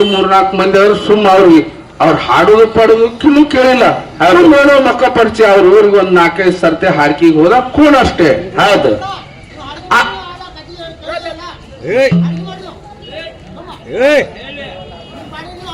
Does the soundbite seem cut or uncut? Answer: uncut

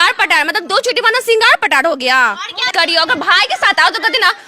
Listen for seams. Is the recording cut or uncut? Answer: cut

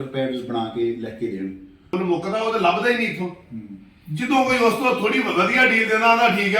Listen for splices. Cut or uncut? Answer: cut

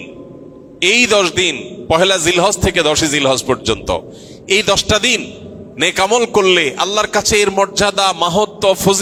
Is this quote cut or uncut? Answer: uncut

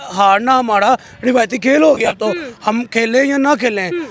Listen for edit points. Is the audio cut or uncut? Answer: uncut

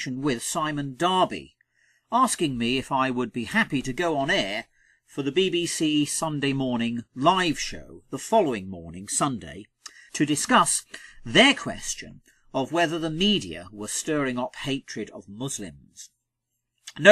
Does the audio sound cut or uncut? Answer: cut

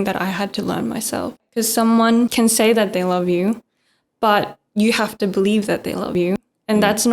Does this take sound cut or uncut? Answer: cut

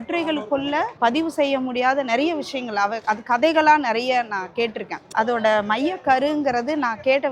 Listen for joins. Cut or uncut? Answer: cut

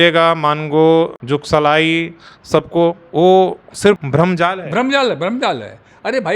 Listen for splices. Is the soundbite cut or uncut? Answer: cut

